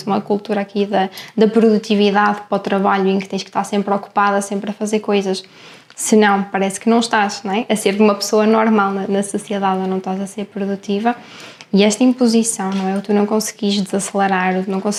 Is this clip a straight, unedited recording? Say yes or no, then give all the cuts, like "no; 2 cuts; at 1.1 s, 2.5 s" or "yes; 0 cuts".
yes; 0 cuts